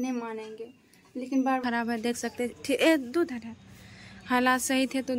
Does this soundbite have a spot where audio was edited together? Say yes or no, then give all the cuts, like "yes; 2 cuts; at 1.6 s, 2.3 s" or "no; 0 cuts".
yes; 1 cut; at 1.6 s